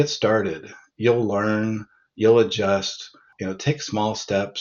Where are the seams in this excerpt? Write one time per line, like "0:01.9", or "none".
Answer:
0:03.4